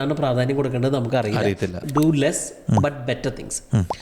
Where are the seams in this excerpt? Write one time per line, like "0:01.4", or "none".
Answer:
0:01.8